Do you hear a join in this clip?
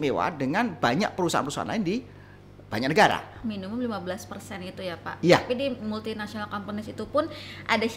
yes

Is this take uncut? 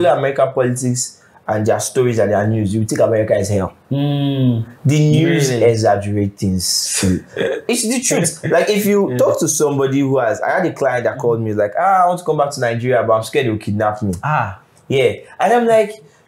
yes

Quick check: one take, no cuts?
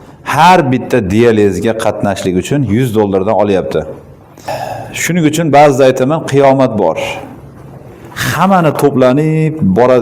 no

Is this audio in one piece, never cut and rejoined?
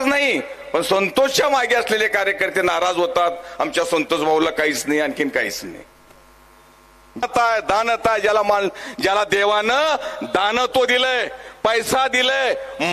no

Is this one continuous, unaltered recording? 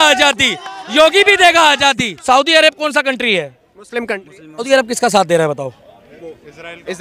no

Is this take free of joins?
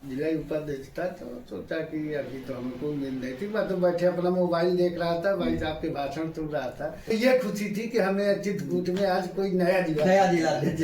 no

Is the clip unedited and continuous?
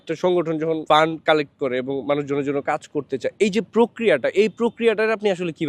yes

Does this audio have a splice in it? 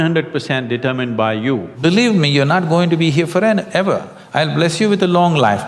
yes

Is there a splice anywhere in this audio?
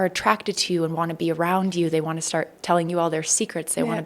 no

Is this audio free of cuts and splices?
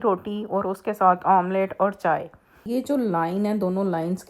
no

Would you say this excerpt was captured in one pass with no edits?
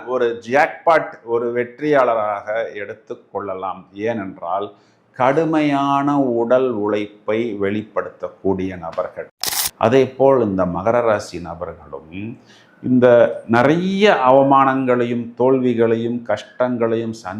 no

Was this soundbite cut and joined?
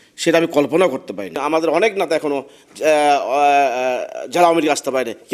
yes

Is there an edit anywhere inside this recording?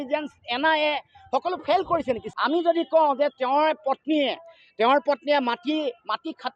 yes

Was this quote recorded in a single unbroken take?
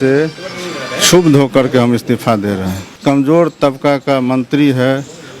no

